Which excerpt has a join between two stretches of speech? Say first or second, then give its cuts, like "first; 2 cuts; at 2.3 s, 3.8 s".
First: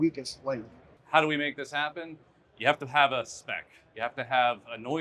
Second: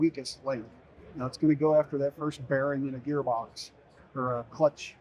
first; 1 cut; at 0.9 s